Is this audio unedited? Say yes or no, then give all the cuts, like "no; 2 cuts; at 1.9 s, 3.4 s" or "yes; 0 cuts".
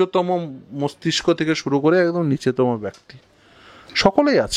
yes; 0 cuts